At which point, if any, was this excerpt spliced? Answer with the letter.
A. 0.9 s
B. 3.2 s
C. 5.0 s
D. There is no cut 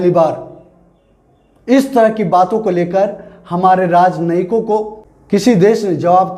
D